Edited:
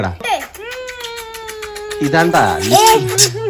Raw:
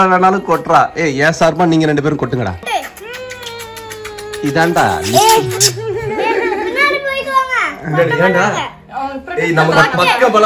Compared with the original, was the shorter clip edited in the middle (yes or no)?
no